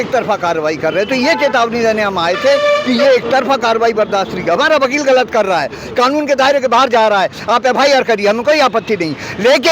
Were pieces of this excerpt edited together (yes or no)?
no